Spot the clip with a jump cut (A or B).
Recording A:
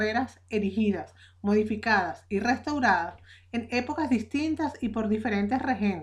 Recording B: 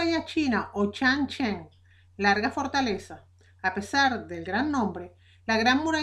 A